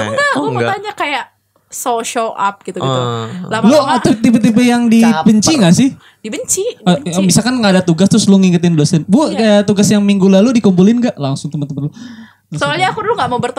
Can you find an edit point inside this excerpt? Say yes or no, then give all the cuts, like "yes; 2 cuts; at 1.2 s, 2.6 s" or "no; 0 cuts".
no; 0 cuts